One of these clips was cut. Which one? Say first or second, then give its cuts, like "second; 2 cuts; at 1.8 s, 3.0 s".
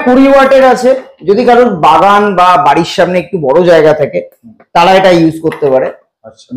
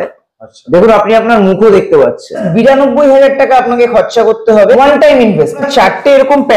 second; 3 cuts; at 2.5 s, 4.8 s, 5.7 s